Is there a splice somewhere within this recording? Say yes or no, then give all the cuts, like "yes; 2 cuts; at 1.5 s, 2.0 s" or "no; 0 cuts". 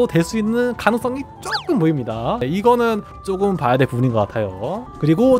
yes; 1 cut; at 2.4 s